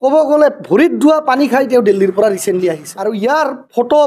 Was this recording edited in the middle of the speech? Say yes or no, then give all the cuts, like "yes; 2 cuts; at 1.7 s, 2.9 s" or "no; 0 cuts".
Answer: yes; 1 cut; at 2.9 s